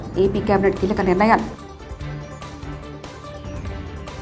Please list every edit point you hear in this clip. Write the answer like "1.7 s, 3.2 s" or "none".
none